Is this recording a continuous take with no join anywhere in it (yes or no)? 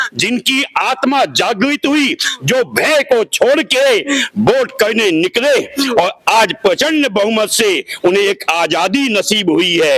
yes